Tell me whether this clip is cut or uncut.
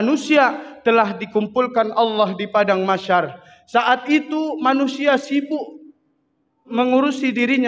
cut